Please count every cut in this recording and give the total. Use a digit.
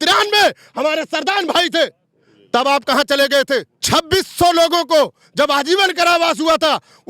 1